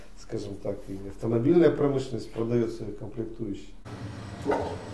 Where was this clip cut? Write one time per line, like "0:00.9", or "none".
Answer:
0:03.9